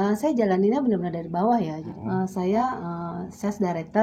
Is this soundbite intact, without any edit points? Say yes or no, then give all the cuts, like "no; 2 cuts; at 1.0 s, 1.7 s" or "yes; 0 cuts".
no; 1 cut; at 1.8 s